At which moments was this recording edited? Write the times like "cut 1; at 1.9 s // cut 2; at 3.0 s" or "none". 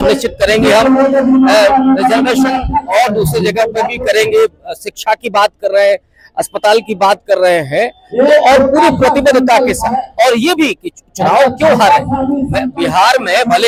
none